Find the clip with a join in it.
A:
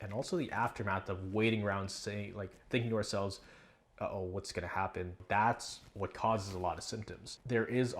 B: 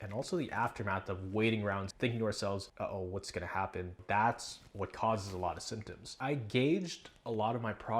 B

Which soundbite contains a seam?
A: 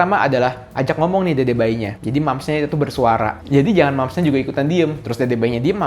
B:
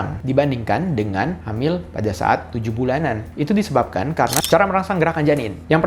B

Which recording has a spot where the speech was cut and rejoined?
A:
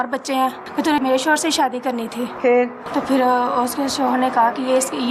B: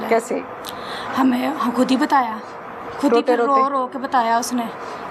A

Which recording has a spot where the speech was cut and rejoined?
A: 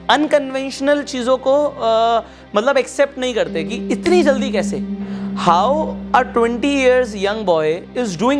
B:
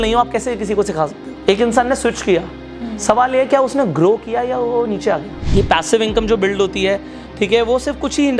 B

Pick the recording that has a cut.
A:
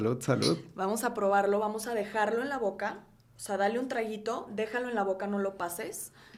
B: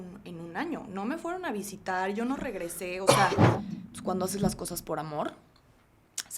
B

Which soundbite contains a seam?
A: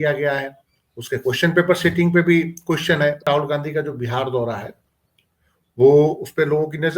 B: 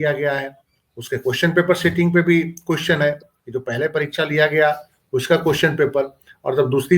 A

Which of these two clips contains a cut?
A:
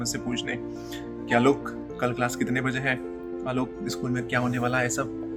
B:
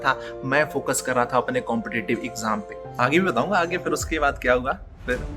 B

